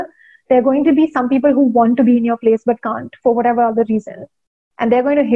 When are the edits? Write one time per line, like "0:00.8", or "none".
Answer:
none